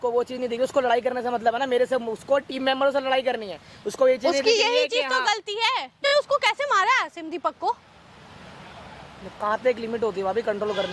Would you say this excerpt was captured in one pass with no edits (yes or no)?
no